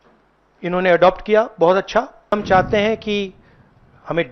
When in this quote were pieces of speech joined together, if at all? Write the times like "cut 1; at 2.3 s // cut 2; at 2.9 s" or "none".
cut 1; at 2.3 s